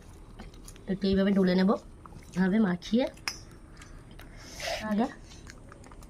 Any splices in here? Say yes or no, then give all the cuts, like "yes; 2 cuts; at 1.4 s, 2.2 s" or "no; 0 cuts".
yes; 2 cuts; at 2.4 s, 4.9 s